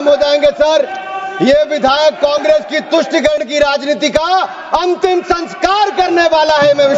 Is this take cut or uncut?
uncut